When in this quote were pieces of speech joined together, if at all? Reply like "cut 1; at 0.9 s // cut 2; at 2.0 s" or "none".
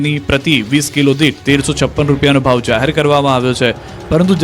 cut 1; at 1.7 s